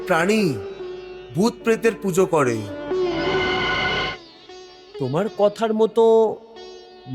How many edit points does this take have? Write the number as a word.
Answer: one